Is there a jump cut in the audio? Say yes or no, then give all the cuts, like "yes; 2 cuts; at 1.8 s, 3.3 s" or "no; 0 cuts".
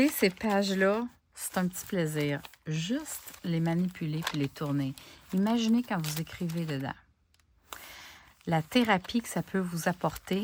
no; 0 cuts